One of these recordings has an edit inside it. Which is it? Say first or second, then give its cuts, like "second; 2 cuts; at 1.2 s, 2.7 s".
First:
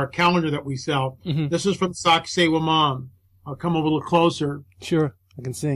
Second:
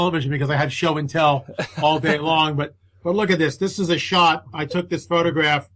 first; 1 cut; at 3.0 s